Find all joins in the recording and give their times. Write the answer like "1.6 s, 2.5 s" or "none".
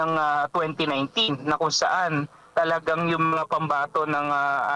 none